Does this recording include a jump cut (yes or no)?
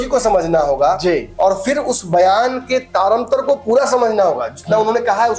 no